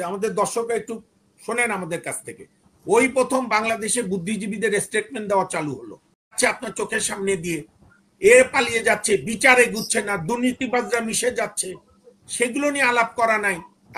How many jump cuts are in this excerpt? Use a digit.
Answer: 1